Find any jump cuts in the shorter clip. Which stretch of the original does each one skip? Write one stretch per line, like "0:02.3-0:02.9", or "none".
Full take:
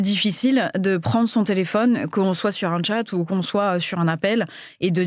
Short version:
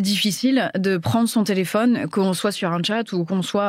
none